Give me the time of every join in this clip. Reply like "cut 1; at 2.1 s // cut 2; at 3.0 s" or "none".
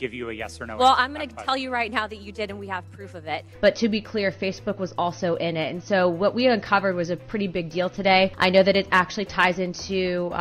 cut 1; at 3.4 s // cut 2; at 8.3 s